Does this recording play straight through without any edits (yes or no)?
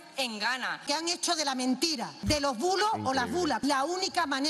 no